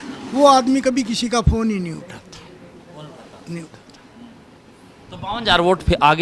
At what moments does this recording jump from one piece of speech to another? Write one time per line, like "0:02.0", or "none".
none